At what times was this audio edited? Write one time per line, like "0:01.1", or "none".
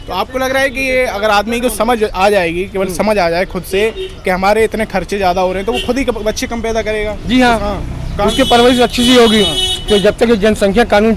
none